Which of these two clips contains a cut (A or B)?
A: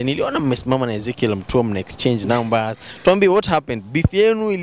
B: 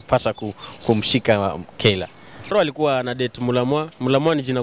B